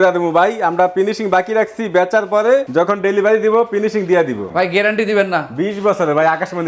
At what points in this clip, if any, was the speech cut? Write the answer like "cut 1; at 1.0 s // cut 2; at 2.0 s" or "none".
cut 1; at 2.7 s // cut 2; at 4.5 s